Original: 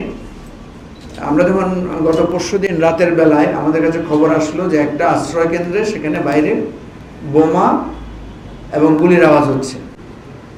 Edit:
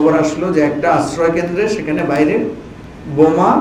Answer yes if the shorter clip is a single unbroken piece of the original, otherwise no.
yes